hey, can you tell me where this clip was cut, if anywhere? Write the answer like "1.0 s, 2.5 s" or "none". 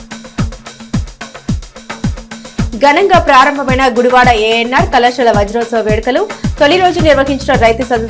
1.1 s